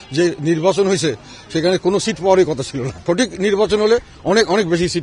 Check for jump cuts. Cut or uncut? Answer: cut